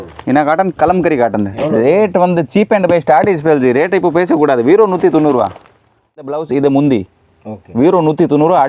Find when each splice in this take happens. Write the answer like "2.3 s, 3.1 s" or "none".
6.3 s